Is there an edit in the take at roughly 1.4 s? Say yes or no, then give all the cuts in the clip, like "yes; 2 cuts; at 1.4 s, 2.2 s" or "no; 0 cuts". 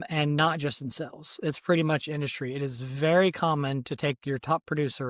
no; 0 cuts